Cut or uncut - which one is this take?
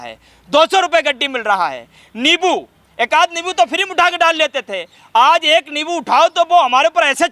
uncut